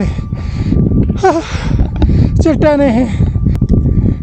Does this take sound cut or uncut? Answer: uncut